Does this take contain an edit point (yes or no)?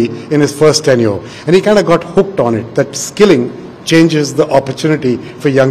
no